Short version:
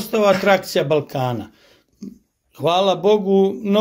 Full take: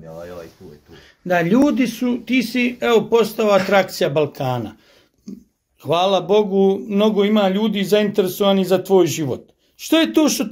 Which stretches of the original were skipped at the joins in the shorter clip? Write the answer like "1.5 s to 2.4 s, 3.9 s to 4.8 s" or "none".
none